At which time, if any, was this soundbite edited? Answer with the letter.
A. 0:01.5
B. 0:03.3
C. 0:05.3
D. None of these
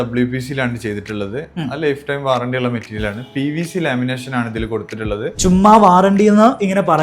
C